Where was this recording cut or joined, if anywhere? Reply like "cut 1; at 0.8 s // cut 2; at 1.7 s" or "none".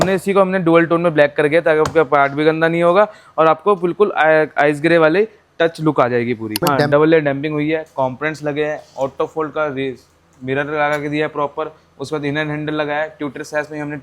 cut 1; at 6.7 s